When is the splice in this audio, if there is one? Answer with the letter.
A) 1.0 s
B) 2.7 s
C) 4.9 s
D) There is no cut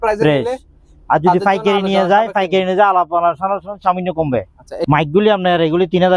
C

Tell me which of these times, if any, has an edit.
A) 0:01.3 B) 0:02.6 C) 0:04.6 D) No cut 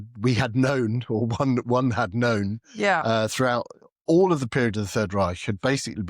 D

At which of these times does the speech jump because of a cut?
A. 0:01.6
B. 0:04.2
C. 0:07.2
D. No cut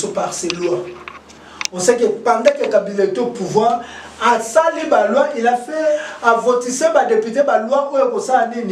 D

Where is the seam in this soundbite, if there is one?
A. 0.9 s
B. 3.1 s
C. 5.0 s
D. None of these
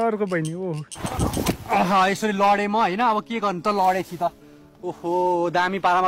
A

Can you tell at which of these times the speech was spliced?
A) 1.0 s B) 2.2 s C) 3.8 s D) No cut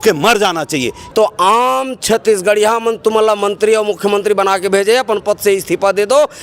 A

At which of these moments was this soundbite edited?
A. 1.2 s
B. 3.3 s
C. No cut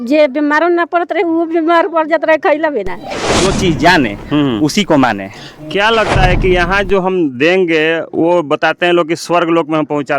B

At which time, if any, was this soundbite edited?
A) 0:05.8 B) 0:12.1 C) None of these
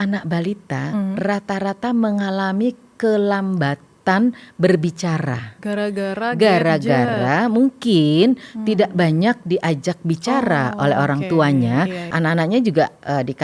B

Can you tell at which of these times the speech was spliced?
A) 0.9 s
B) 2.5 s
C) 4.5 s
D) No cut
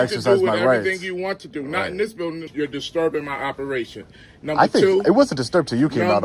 B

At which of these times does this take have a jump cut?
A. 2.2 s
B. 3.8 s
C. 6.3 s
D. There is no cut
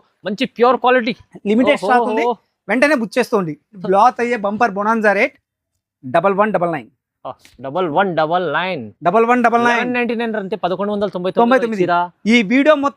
B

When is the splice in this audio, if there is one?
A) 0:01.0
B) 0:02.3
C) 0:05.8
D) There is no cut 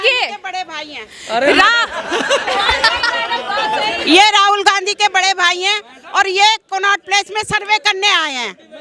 D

